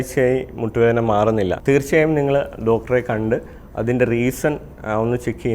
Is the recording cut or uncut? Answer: cut